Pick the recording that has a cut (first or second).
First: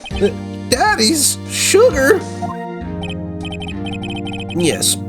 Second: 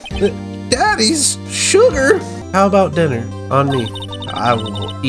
second